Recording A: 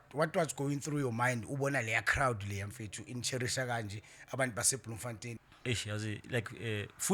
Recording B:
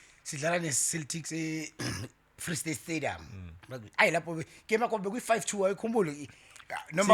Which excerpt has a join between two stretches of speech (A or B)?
A